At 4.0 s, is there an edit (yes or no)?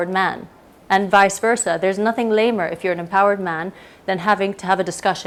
no